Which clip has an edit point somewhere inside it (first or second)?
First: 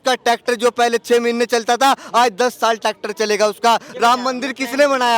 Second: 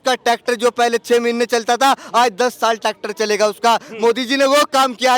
first